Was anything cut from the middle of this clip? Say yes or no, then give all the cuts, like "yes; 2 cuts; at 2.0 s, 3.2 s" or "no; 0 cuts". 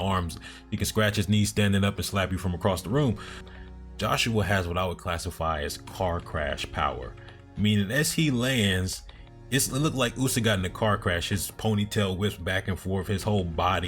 yes; 1 cut; at 3.4 s